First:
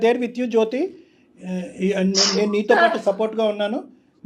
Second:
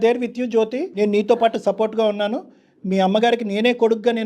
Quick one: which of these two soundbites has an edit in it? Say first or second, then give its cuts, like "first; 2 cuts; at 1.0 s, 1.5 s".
second; 1 cut; at 0.9 s